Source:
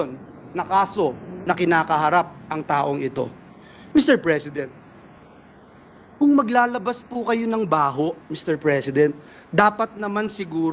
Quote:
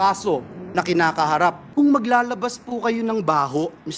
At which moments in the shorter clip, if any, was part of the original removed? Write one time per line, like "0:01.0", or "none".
0:01.6

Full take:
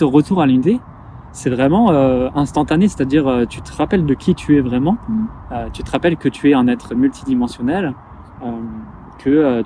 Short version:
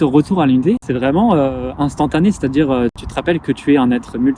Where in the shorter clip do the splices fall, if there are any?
0:00.9
0:03.0

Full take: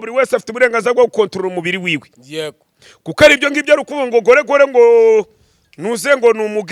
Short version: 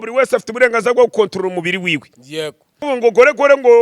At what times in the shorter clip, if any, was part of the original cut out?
0:02.8

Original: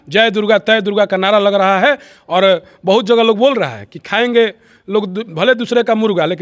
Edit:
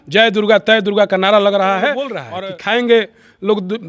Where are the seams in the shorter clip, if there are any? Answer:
0:02.2

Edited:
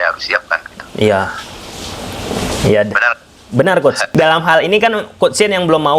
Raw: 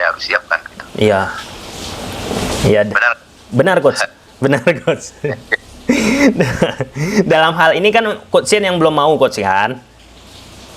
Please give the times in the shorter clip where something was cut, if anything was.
0:04.1

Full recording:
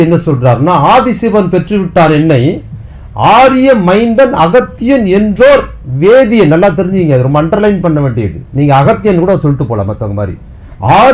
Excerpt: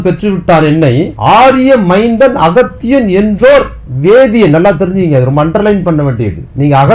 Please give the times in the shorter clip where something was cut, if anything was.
0:01.1

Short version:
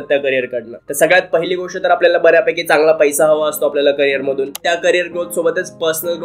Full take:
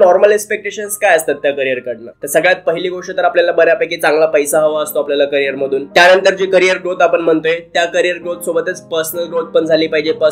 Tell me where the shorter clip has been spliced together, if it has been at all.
0:04.5

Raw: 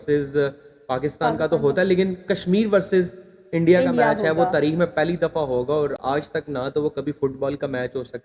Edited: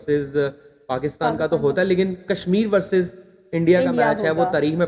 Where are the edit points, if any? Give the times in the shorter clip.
none

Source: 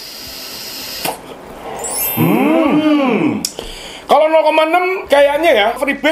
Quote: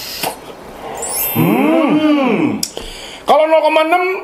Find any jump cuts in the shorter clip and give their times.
none

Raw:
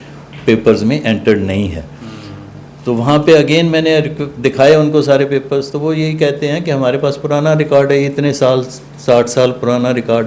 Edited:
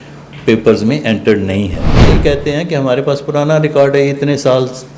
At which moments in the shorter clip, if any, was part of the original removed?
0:02.0

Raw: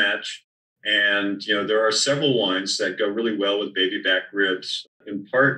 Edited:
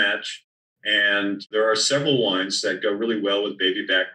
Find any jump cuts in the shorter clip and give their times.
0:01.5

